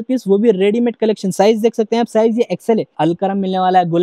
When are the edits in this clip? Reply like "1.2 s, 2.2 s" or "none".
3.0 s